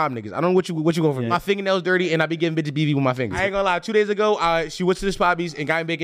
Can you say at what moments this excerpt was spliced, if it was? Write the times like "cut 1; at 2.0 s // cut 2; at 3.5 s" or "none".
cut 1; at 1.3 s // cut 2; at 3.3 s